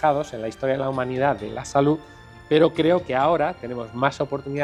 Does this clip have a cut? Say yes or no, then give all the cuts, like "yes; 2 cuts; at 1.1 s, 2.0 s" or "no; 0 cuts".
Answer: no; 0 cuts